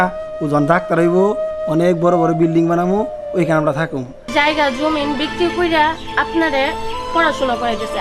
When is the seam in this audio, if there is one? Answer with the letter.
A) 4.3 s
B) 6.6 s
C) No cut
A